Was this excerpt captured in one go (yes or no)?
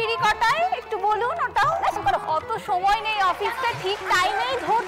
no